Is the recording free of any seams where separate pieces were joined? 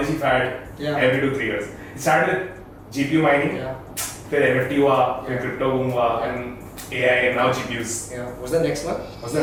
yes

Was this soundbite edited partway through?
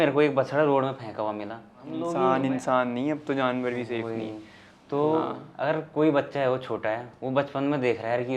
yes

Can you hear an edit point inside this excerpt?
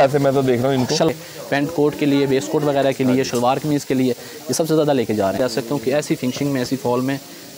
yes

